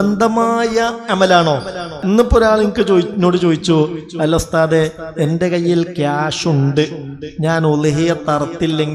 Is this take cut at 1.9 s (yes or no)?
yes